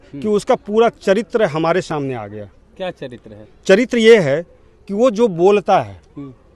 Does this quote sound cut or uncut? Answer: uncut